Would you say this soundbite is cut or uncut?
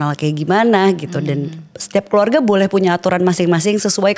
uncut